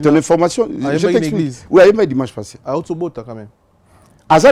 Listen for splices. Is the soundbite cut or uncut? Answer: uncut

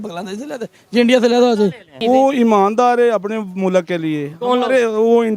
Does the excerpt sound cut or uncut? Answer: cut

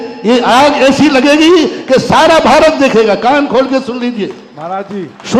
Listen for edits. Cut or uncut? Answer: uncut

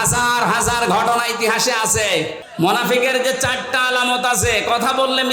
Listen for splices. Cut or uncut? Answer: cut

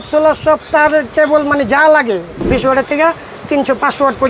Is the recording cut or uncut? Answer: cut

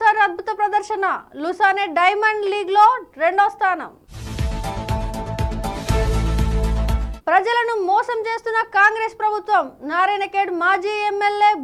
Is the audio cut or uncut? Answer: uncut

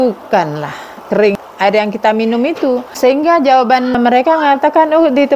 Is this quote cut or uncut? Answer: cut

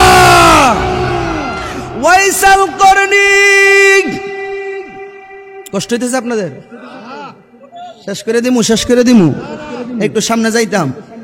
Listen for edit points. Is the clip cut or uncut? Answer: uncut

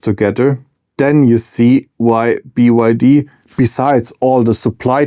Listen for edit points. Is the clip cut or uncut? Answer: uncut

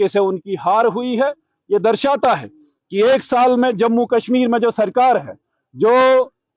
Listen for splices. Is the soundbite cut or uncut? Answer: uncut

